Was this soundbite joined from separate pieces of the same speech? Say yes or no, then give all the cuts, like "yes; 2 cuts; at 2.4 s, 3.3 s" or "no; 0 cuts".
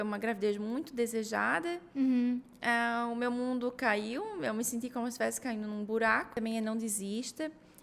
yes; 1 cut; at 6.3 s